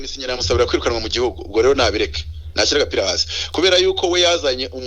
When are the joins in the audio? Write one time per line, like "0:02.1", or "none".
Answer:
none